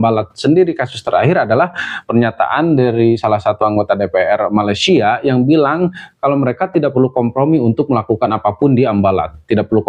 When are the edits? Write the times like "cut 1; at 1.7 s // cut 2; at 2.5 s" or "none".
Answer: none